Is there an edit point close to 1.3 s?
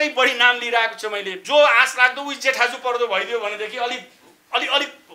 yes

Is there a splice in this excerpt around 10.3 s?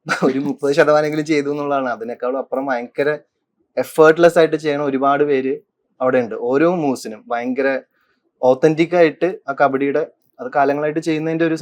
no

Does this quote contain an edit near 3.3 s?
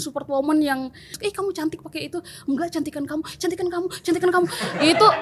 no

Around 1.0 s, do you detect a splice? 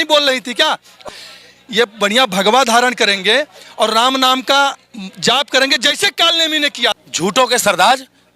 yes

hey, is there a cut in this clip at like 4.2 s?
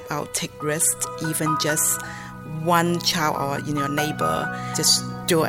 no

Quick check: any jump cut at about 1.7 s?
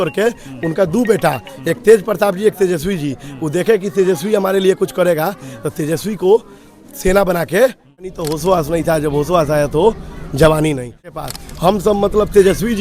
no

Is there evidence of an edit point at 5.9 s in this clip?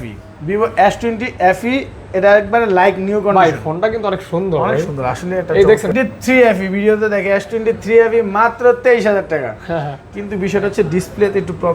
yes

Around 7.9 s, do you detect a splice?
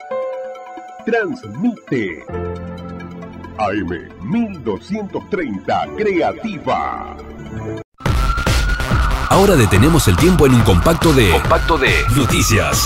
yes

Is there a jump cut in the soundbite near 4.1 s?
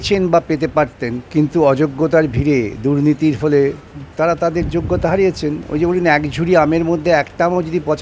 no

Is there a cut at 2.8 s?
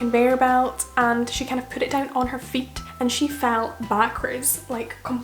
yes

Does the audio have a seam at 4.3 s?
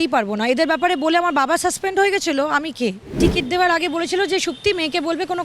no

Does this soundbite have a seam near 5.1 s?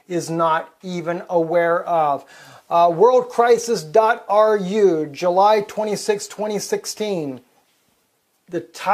yes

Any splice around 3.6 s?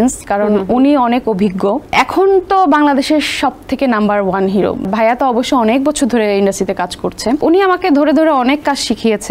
no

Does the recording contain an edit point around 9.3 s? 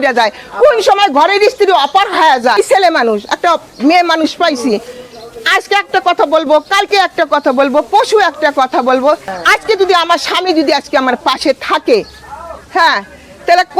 yes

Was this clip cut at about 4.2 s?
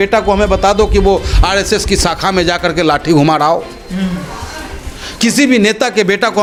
no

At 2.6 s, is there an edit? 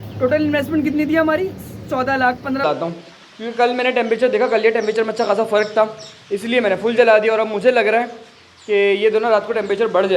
yes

